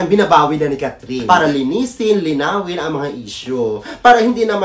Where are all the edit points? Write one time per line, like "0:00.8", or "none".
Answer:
0:01.2